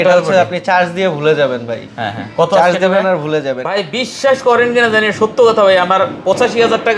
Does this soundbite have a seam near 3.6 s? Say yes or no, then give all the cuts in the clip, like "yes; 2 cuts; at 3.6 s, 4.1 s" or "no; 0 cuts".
yes; 1 cut; at 3.6 s